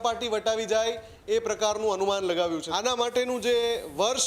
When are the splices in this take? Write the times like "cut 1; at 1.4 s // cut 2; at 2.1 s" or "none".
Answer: cut 1; at 2.7 s